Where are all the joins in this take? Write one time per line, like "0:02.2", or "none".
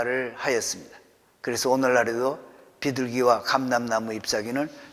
none

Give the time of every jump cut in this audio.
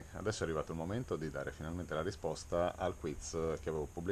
none

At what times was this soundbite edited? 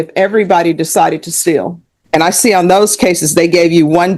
0:01.9

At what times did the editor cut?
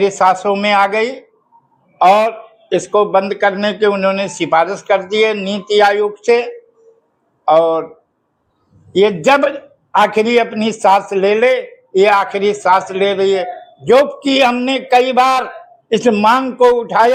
none

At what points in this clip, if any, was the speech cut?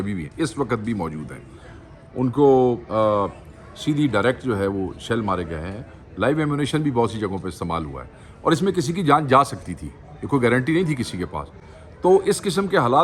none

